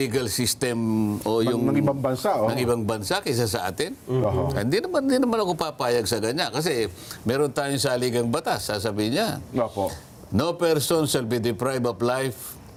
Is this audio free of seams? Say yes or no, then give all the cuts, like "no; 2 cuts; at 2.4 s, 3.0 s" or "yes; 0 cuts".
yes; 0 cuts